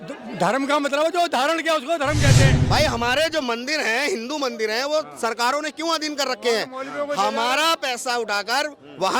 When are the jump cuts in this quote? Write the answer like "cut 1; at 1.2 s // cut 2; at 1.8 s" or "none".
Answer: cut 1; at 2.6 s

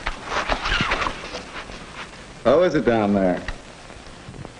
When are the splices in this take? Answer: cut 1; at 2.7 s

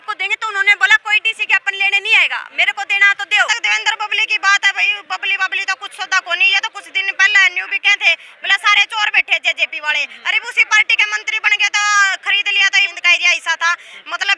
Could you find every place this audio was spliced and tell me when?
cut 1; at 3.5 s // cut 2; at 12.9 s

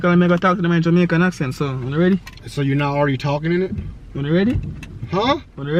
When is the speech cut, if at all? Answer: none

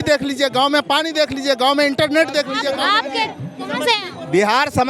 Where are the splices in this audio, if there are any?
cut 1; at 2.6 s

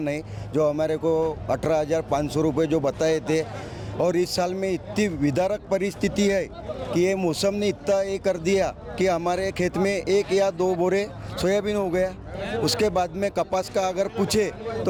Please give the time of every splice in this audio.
none

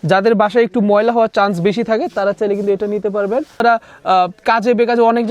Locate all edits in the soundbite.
cut 1; at 3.6 s

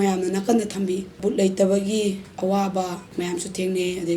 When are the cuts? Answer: cut 1; at 1.2 s // cut 2; at 3.0 s

